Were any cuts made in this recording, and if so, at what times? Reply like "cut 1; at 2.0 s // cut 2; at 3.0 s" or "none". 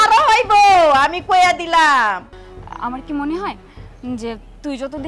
cut 1; at 2.3 s